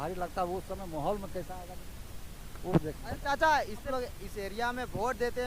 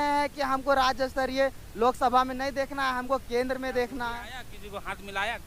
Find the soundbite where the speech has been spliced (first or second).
first